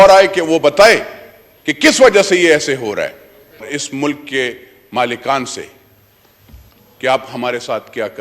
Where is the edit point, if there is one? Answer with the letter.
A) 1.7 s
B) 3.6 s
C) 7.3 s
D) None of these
B